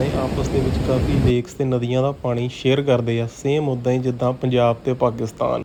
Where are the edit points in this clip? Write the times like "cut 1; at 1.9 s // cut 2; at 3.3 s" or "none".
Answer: none